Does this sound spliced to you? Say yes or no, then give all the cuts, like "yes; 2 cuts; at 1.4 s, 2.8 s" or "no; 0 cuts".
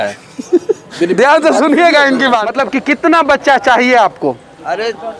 yes; 1 cut; at 2.5 s